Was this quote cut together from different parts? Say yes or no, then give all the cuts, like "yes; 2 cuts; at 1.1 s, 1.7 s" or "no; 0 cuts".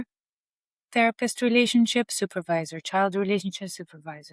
no; 0 cuts